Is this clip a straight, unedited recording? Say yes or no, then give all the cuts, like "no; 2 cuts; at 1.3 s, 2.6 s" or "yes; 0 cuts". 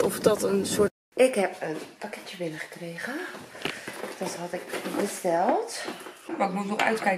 no; 2 cuts; at 0.9 s, 6.3 s